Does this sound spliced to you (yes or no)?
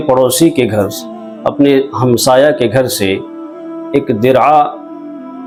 no